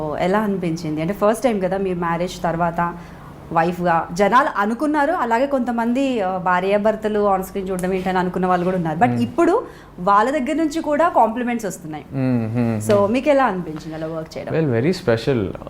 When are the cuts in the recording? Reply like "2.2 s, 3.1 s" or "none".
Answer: none

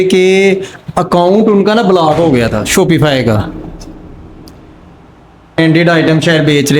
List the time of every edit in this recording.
5.6 s

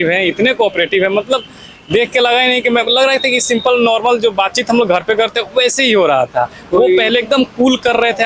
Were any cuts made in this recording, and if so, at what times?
none

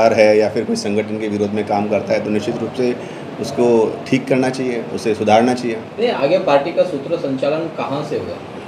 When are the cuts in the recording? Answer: none

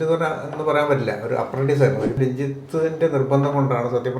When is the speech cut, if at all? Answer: 2.2 s

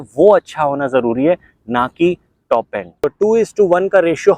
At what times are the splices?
2.9 s

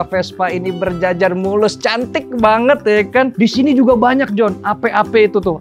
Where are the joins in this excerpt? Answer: none

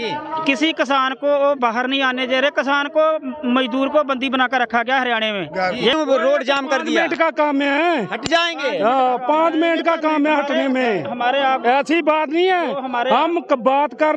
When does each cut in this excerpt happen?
5.9 s

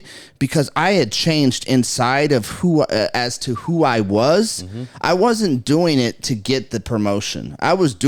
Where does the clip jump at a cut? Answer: none

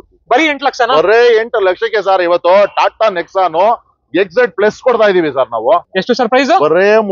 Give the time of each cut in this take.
5.9 s

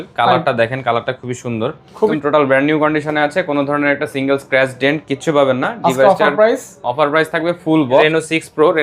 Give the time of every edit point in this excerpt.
2.2 s, 8.0 s

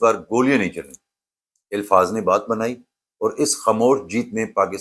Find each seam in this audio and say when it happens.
none

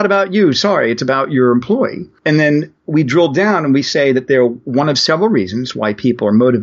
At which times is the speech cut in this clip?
2.1 s

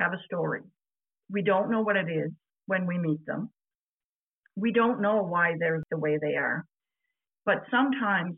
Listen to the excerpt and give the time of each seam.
5.8 s

